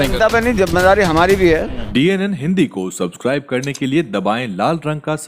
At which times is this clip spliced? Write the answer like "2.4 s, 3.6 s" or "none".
1.8 s

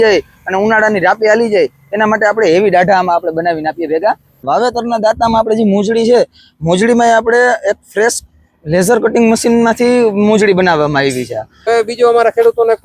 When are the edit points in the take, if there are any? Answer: 4.4 s, 11.7 s

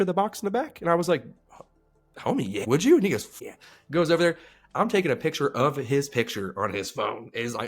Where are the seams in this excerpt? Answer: 2.6 s

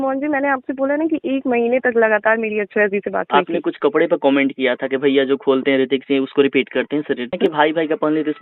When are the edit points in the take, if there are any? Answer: 3.3 s, 7.3 s

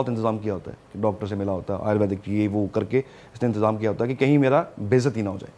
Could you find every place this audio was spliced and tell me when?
none

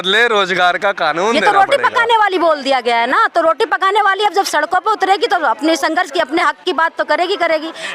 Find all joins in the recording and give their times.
1.4 s

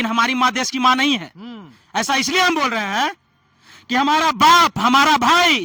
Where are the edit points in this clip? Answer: none

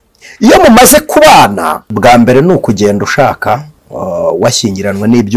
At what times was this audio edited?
1.8 s

